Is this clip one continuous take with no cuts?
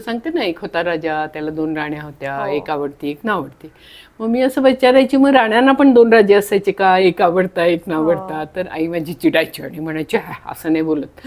yes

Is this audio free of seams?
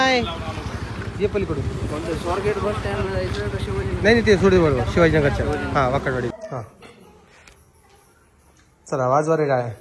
no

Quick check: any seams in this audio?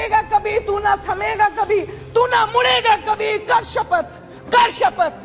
no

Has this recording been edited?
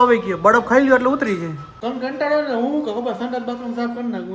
yes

